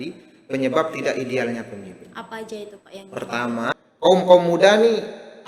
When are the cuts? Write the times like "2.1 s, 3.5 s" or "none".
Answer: 3.7 s